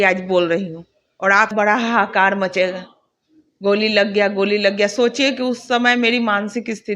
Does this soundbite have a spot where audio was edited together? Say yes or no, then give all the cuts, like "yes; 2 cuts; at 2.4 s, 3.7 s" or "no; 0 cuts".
yes; 1 cut; at 1.5 s